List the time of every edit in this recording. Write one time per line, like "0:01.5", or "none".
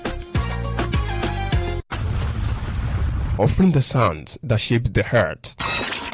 0:01.9